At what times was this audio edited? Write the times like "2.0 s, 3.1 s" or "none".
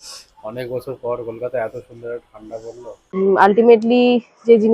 3.3 s